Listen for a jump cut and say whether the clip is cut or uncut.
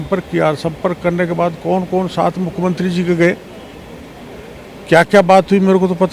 uncut